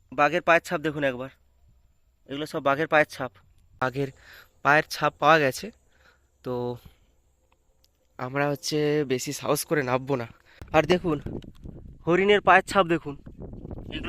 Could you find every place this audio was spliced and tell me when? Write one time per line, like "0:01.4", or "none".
0:03.8
0:10.5